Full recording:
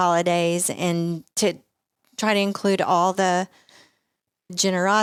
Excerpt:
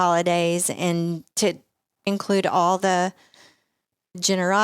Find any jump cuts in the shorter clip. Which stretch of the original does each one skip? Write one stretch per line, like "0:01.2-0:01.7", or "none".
0:02.1-0:02.4